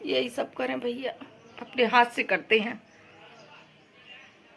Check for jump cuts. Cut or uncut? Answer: uncut